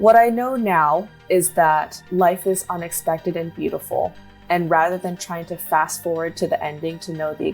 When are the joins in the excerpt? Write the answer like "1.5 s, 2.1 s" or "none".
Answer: 1.1 s, 2.0 s